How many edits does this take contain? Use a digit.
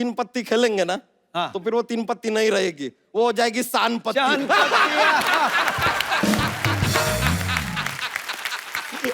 0